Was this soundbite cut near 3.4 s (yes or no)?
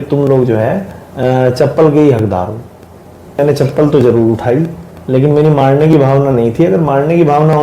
yes